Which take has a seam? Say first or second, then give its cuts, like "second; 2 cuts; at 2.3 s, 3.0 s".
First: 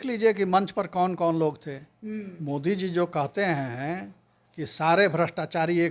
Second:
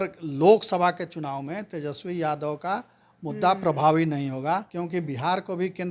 second; 1 cut; at 4.7 s